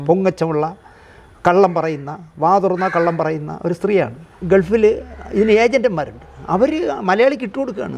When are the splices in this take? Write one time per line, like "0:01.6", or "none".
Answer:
0:04.3